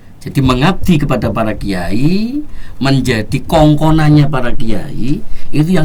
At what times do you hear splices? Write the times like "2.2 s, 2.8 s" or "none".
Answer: none

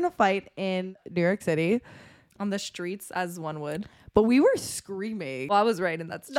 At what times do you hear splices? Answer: 1.0 s, 5.4 s

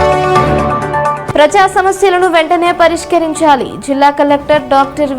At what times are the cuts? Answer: 1.1 s

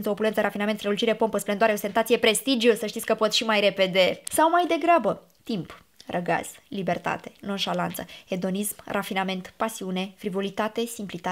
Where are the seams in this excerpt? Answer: 4.2 s

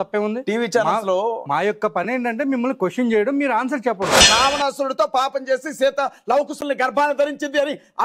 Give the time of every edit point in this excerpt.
4.2 s

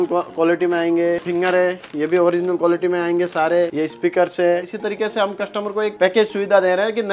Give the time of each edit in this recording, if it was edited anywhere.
1.3 s, 3.7 s, 4.7 s

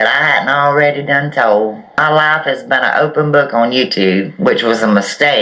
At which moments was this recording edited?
none

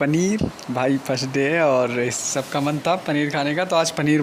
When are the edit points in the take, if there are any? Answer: none

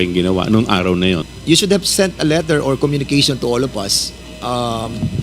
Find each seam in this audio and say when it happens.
1.3 s

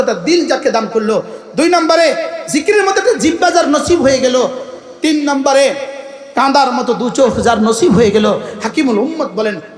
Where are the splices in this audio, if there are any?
none

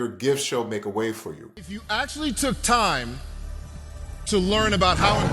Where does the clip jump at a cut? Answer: 1.5 s

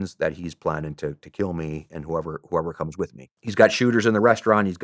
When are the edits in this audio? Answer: 3.4 s

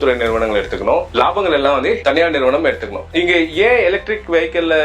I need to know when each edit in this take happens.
3.0 s

